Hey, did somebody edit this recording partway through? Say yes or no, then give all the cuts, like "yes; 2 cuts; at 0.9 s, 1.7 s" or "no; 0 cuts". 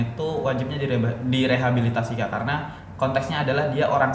no; 0 cuts